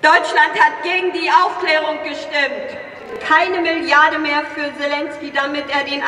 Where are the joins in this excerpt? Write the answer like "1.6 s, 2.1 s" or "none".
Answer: 3.2 s